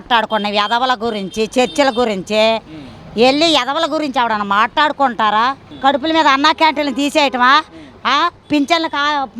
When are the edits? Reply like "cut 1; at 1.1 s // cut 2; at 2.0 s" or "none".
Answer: cut 1; at 5.7 s